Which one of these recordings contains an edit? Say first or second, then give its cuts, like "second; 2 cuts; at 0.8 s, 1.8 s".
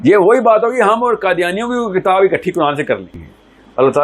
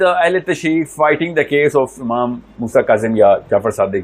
first; 1 cut; at 3.1 s